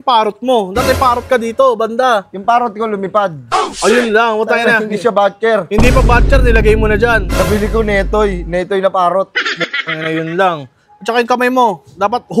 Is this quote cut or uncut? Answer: uncut